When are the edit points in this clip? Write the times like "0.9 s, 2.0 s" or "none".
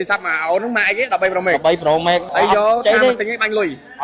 2.3 s